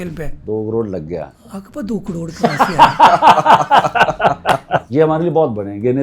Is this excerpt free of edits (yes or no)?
no